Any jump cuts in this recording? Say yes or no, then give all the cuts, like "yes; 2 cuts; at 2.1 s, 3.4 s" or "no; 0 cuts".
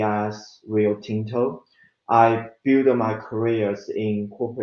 yes; 1 cut; at 2.0 s